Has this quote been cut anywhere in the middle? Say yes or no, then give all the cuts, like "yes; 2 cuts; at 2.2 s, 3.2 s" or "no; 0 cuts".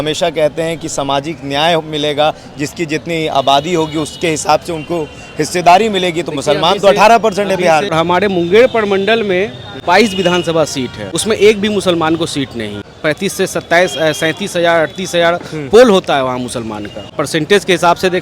yes; 5 cuts; at 7.9 s, 9.7 s, 11.0 s, 12.9 s, 17.1 s